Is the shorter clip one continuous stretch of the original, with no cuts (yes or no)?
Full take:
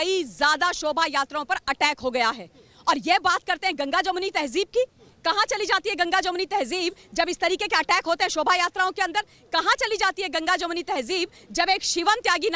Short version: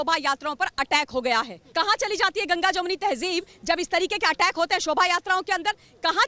no